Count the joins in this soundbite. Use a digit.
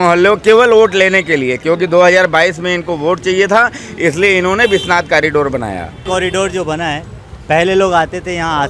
1